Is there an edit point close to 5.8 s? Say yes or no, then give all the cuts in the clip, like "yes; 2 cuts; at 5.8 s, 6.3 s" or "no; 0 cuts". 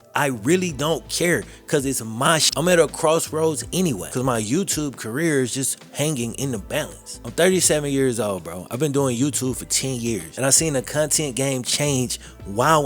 no; 2 cuts; at 2.5 s, 4.0 s